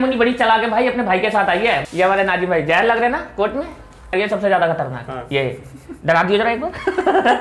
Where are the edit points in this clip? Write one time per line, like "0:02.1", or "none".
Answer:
0:01.8
0:04.1